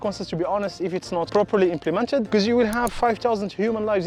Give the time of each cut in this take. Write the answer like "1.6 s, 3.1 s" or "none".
1.3 s

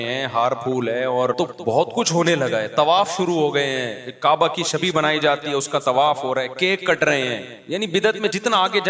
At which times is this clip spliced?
1.4 s, 4.0 s, 7.5 s

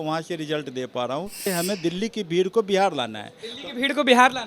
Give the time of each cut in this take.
1.5 s

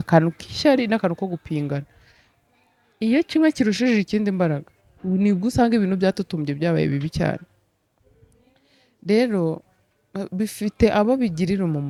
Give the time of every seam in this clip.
none

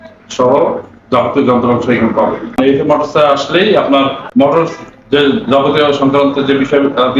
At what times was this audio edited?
2.6 s, 4.2 s

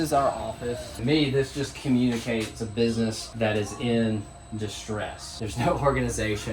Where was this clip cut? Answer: 0.9 s, 3.2 s, 5.3 s

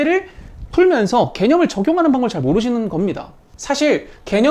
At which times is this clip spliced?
3.4 s

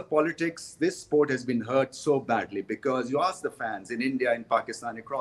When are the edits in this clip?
none

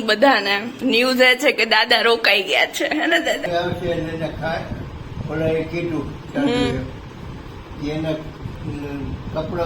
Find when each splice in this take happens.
3.5 s

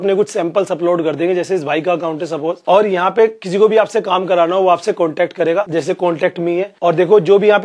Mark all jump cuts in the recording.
2.6 s, 5.7 s, 6.7 s

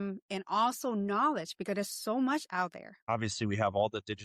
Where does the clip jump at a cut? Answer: 3.0 s

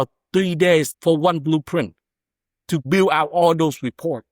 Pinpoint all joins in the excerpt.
0.9 s, 2.8 s

